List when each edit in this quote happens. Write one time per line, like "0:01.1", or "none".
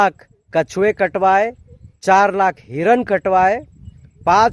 none